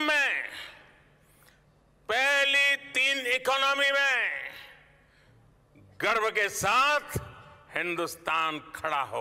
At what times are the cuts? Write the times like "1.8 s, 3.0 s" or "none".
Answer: none